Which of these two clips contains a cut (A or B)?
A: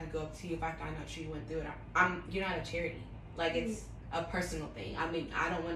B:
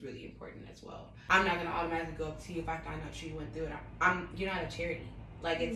B